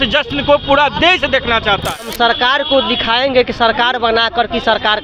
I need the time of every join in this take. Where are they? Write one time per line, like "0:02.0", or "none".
0:02.1